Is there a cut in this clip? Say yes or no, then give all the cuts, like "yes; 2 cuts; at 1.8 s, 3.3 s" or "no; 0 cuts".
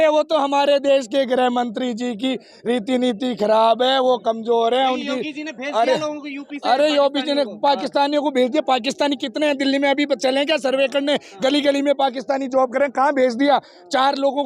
no; 0 cuts